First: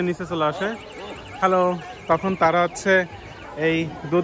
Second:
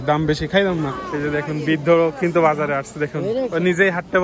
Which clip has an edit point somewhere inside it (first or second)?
second